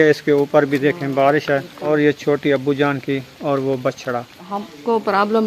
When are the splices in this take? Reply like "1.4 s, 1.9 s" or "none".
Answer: 1.8 s, 4.4 s